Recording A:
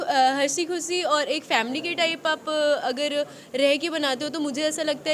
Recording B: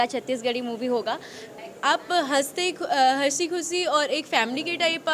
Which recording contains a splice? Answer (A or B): B